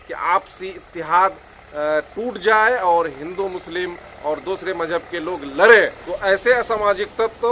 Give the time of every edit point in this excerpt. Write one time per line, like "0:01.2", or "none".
0:06.0